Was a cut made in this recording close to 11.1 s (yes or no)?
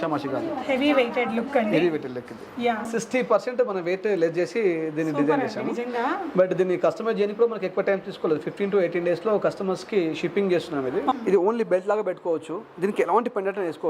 yes